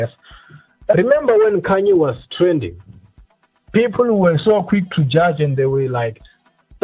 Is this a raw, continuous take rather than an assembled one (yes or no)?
no